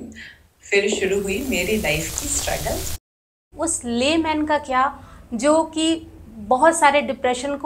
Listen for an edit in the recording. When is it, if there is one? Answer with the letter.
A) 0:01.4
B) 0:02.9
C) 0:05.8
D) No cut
B